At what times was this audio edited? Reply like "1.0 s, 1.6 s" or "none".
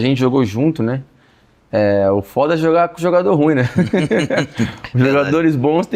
none

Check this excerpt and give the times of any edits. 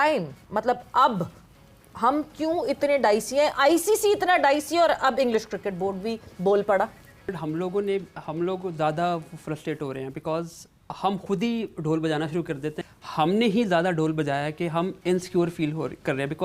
7.3 s, 12.9 s

